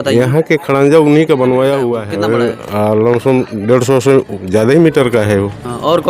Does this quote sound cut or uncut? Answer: cut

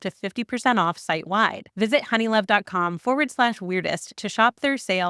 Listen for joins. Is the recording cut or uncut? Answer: uncut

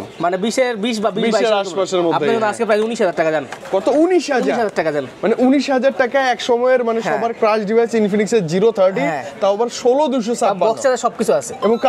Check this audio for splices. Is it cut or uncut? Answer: uncut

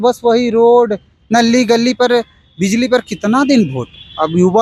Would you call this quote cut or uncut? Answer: uncut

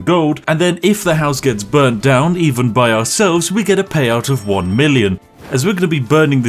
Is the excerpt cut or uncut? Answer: cut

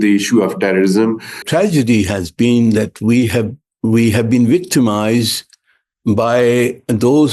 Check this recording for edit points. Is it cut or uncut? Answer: cut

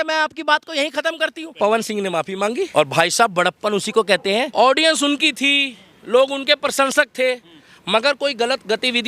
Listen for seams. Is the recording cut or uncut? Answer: cut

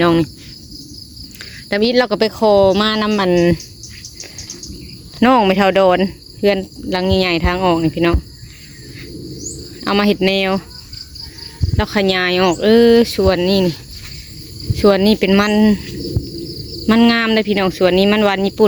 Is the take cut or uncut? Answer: uncut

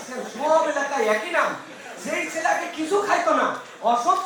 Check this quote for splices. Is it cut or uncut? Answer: uncut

